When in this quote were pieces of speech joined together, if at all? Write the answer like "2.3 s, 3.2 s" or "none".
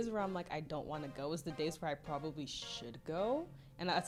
none